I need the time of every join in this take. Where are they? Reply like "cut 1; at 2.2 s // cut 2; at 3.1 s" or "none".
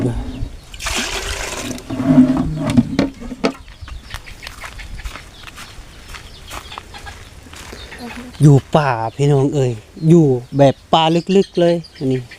cut 1; at 3.7 s